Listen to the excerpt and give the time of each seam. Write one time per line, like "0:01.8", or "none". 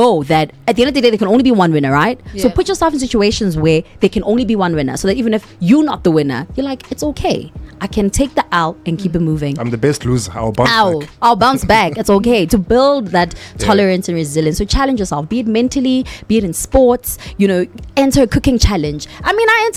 none